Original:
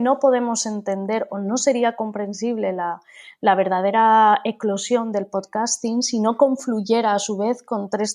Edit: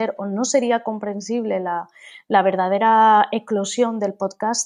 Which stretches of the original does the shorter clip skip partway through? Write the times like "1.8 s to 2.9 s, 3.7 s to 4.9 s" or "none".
none